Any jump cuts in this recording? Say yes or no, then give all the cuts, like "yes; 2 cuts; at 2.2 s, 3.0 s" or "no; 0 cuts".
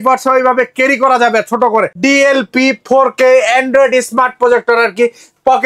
yes; 1 cut; at 1.9 s